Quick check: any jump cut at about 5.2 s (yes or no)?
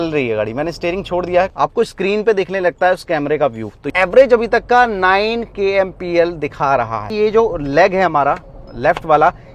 no